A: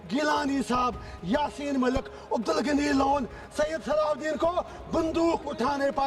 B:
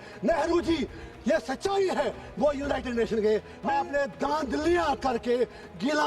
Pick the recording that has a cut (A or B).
B